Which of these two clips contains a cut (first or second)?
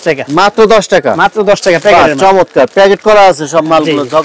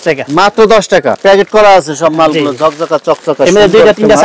second